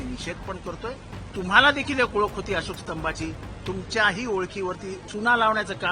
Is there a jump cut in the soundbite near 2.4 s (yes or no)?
no